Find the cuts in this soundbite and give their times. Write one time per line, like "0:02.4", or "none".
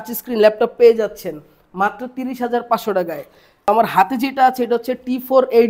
0:03.7